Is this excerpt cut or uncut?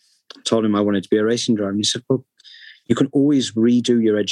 uncut